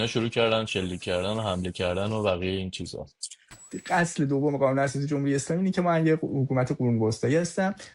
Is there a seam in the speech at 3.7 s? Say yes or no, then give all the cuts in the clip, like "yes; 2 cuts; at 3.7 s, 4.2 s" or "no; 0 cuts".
yes; 1 cut; at 3.7 s